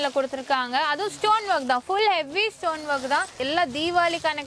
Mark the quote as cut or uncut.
cut